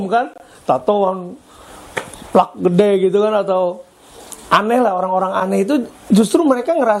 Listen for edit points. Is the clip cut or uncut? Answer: uncut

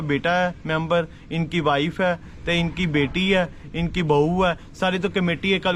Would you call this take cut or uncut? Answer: uncut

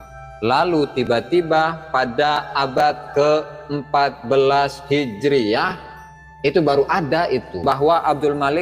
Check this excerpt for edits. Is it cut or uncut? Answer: cut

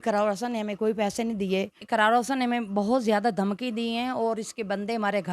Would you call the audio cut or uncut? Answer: cut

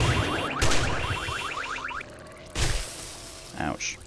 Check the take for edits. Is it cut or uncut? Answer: cut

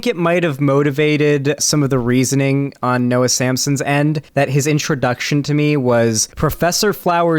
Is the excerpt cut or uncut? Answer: cut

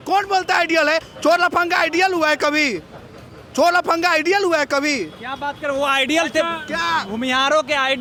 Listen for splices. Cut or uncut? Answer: uncut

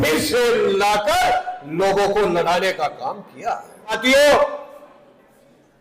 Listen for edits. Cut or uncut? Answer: cut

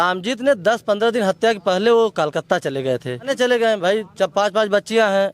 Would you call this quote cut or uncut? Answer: cut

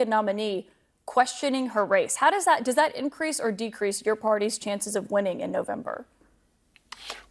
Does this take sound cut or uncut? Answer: cut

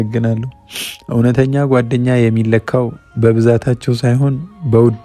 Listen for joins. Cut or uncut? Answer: uncut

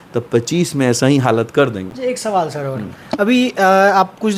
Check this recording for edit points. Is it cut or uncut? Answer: uncut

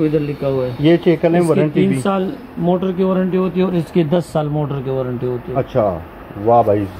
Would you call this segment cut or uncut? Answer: uncut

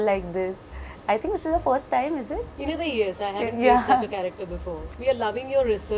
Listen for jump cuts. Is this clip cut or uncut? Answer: cut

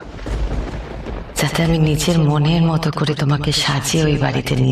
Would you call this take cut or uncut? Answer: uncut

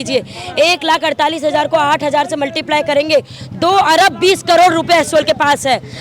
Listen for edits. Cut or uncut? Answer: uncut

